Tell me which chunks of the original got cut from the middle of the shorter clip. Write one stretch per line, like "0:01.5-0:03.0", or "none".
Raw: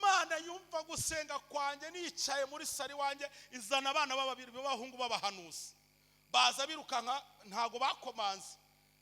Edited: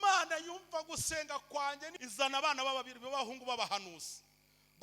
0:01.9-0:03.4